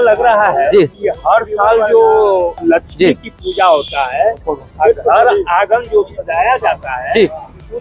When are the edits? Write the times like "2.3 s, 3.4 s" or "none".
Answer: 1.0 s, 2.6 s